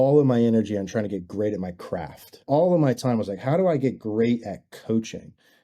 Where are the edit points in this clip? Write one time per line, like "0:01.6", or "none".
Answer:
0:02.3

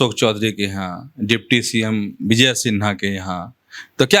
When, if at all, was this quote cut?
none

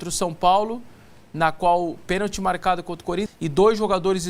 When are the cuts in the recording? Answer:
0:03.3

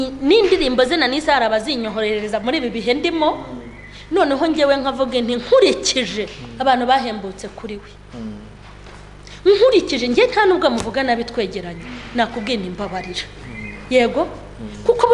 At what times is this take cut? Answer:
none

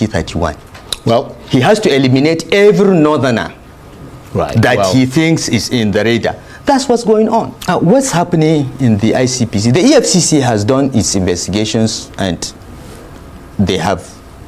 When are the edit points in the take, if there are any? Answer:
0:07.7

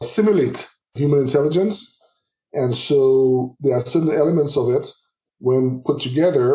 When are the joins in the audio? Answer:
0:00.9

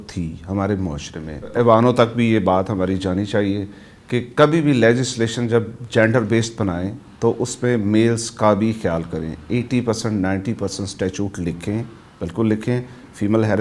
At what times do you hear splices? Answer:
0:01.5

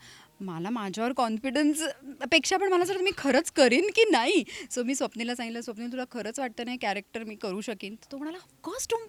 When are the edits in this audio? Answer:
none

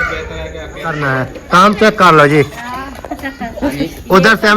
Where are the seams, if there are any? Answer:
0:01.0

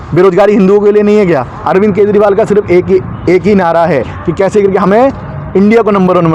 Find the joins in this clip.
0:01.5
0:04.2

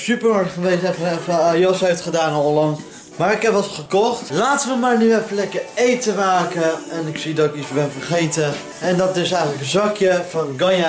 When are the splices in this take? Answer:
0:03.8
0:08.7

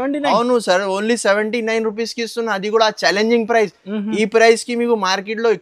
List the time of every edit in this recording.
none

